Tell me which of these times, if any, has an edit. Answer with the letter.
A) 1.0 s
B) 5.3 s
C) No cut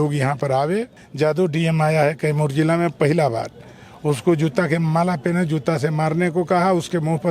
A